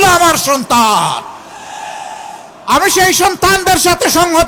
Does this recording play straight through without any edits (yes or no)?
yes